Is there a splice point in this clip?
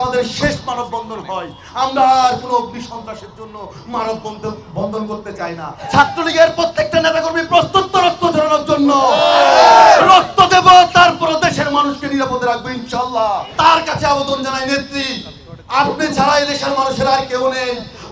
yes; 2 cuts; at 5.9 s, 13.5 s

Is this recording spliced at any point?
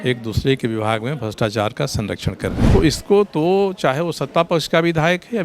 yes; 1 cut; at 2.6 s

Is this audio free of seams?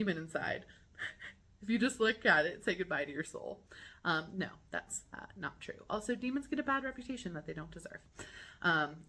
yes; 0 cuts

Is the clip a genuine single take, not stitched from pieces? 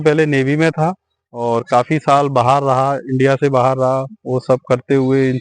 yes; 0 cuts

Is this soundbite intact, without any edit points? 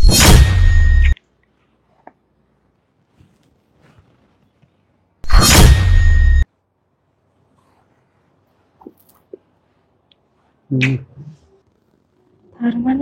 no; 2 cuts; at 1.0 s, 2.8 s

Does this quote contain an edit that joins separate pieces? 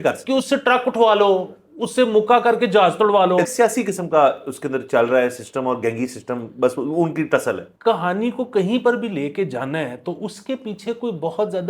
yes; 2 cuts; at 3.4 s, 7.7 s

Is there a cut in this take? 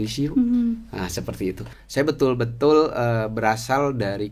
yes; 1 cut; at 1.7 s

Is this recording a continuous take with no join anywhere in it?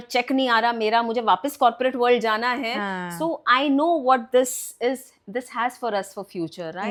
yes; 0 cuts

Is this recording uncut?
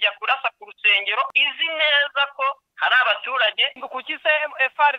no; 3 cuts; at 1.3 s, 2.7 s, 3.7 s

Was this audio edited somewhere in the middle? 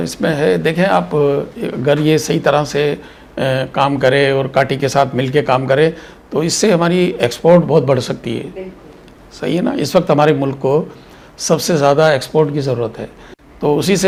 no; 0 cuts

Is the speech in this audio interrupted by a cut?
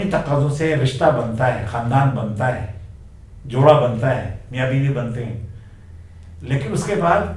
no; 0 cuts

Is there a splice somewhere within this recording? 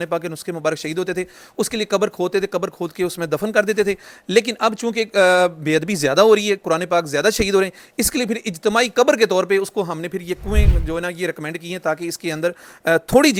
no; 0 cuts

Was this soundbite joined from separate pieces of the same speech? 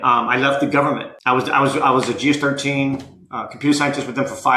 no; 0 cuts

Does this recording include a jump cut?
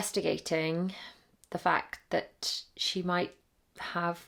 no; 0 cuts

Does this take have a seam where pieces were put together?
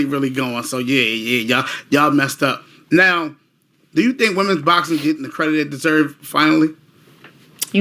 no; 0 cuts

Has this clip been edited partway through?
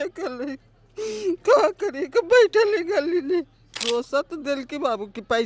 yes; 1 cut; at 3.8 s

